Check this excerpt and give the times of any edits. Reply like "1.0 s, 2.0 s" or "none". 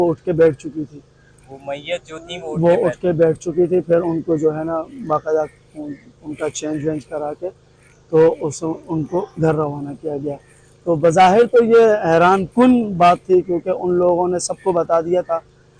none